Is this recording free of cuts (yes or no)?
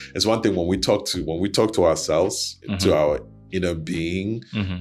yes